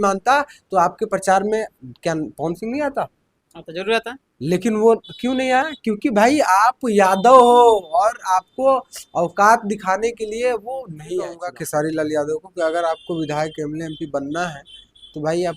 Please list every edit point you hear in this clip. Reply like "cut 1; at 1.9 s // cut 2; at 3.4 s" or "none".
cut 1; at 11.5 s